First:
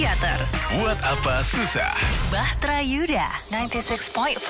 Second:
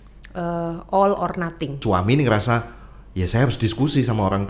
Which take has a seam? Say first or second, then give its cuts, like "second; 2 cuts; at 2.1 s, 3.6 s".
second; 1 cut; at 1.8 s